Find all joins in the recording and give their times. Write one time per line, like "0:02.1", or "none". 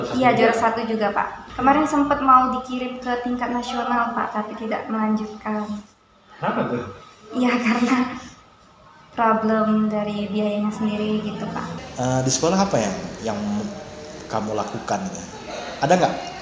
0:01.4
0:11.8